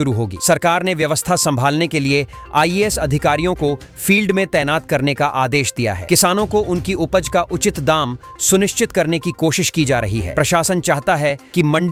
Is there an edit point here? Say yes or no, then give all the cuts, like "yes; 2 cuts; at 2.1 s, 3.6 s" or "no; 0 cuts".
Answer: no; 0 cuts